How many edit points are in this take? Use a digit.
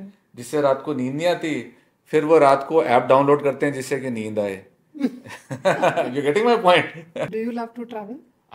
1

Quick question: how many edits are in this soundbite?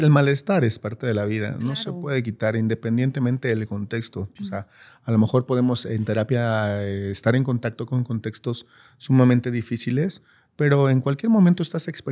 0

